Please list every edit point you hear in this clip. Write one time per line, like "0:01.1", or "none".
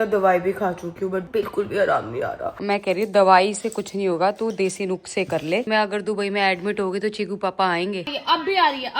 0:01.3
0:02.6
0:05.6
0:08.0